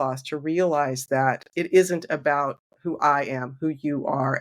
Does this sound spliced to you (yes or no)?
yes